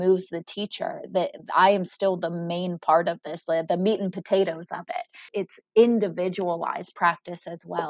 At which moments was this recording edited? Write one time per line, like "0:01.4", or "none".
0:05.3